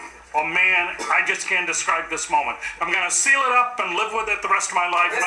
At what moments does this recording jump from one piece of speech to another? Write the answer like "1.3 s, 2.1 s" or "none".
none

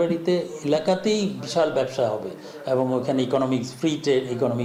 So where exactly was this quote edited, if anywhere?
none

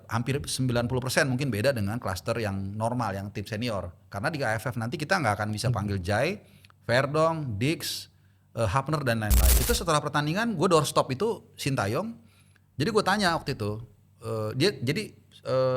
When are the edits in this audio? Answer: 9.5 s

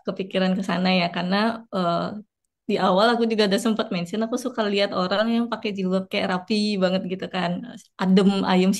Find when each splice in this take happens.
none

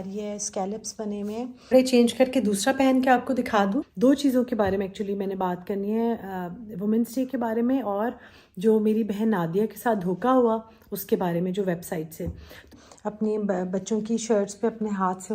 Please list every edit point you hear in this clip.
1.7 s, 3.9 s, 12.7 s

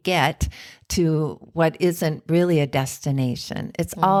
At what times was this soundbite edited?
none

